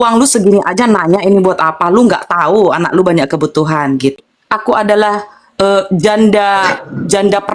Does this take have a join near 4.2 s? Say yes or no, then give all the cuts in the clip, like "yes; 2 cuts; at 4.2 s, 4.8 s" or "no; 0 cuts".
yes; 1 cut; at 4.2 s